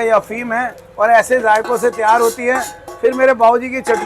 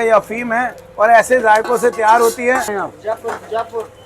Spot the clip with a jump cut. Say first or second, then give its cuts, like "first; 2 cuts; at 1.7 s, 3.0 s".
second; 1 cut; at 2.8 s